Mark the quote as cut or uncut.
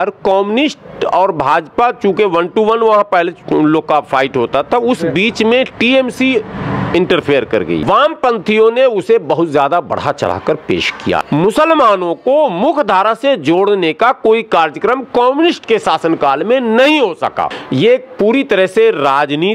cut